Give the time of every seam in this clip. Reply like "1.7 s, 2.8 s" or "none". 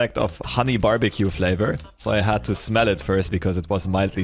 1.9 s